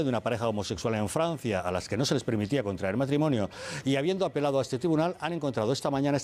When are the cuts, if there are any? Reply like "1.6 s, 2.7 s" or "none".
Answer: none